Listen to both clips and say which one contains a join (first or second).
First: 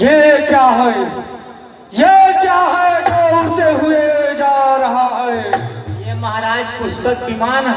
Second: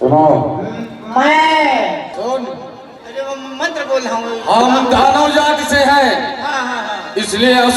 second